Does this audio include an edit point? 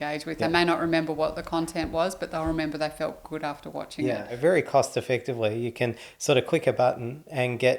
yes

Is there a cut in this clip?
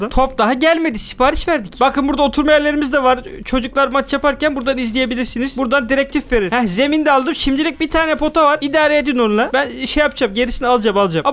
no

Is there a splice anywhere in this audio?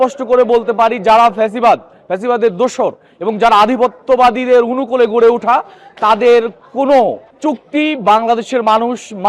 no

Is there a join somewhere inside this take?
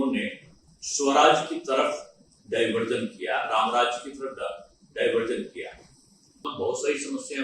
yes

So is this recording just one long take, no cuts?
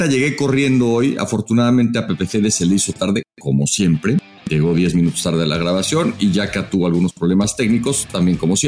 yes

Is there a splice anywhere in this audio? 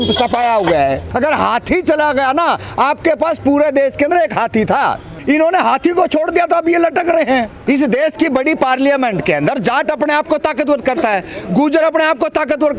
yes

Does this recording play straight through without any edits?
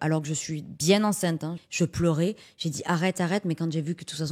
no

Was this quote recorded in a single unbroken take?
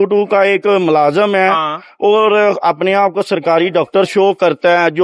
yes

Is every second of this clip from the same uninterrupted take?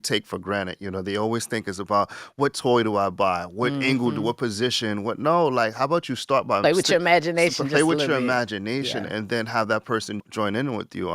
no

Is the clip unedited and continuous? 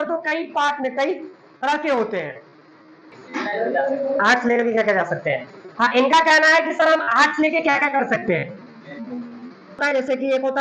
no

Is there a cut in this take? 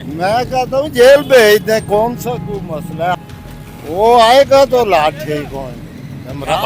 yes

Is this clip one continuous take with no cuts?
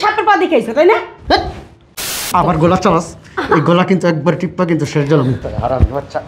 no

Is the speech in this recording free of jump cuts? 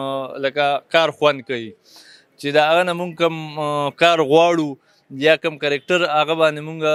yes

